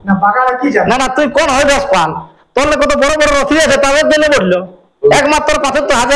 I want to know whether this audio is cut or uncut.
cut